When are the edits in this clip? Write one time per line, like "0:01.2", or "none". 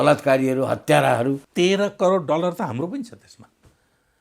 0:01.4